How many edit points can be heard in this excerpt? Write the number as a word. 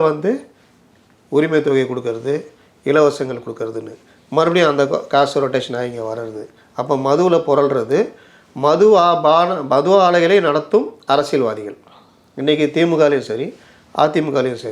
one